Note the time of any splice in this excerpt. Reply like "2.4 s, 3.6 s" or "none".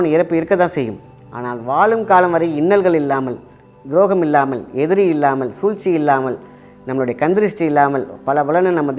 none